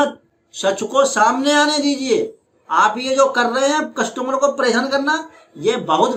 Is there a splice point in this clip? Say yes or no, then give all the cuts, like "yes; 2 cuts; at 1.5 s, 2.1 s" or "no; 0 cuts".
no; 0 cuts